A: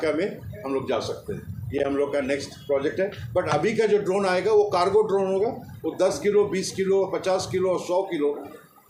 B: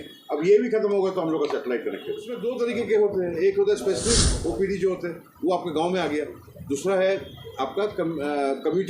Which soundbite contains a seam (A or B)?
B